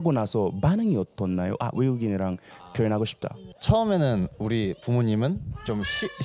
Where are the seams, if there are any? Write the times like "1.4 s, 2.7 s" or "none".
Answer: none